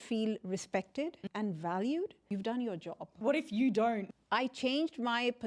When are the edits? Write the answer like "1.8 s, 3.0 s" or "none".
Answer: 1.2 s, 2.3 s, 3.1 s, 4.1 s